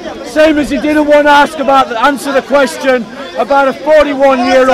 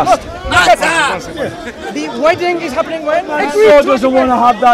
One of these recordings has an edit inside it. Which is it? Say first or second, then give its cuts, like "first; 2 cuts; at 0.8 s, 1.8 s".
second; 1 cut; at 3.3 s